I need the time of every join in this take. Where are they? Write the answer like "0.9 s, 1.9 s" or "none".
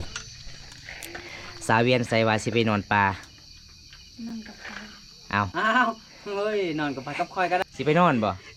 7.6 s